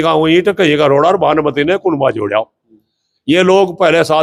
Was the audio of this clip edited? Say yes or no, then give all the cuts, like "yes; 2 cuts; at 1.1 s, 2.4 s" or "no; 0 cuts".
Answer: no; 0 cuts